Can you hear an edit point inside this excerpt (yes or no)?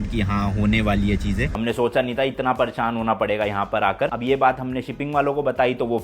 yes